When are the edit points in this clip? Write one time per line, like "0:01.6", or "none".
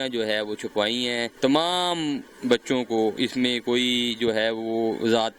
0:01.3